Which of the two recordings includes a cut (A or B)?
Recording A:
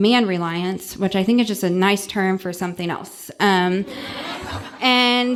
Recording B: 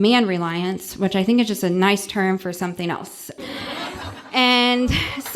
B